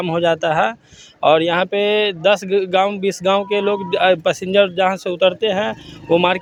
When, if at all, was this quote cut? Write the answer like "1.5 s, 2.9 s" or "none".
none